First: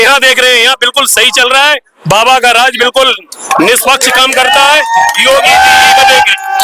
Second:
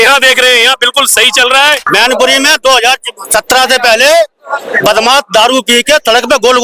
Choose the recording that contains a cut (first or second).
second